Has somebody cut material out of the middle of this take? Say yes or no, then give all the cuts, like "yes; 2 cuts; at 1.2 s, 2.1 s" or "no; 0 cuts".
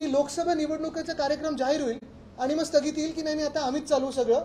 no; 0 cuts